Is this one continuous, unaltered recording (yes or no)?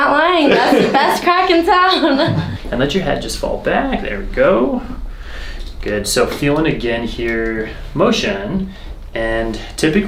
yes